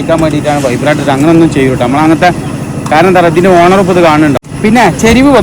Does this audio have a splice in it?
yes; 1 cut; at 4.5 s

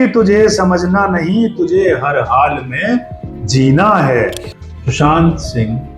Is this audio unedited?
no; 1 cut; at 4.4 s

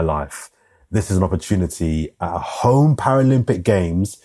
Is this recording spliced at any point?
no; 0 cuts

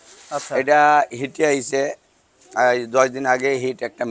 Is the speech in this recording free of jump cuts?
yes; 0 cuts

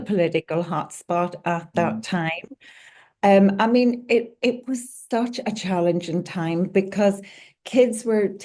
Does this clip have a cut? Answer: no; 0 cuts

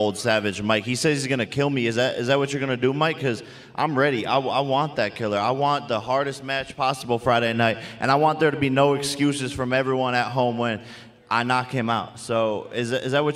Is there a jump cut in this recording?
no; 0 cuts

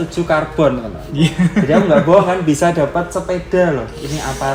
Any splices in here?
no; 0 cuts

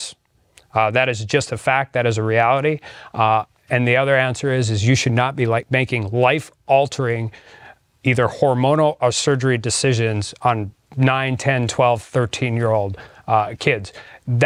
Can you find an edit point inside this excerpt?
no; 0 cuts

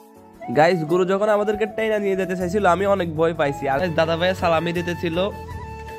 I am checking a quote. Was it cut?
yes; 1 cut; at 3.8 s

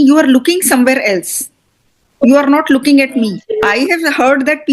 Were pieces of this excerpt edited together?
yes; 1 cut; at 3.7 s

